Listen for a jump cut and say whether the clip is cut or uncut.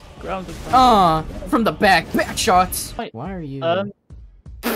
uncut